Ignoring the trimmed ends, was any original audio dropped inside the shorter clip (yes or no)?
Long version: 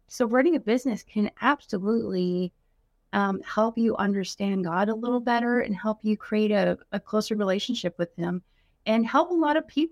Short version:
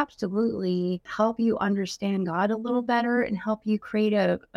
yes